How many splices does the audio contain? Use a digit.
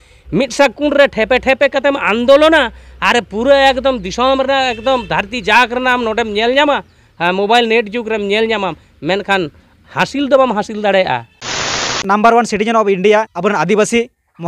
2